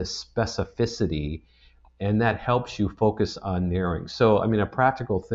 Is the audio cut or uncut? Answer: uncut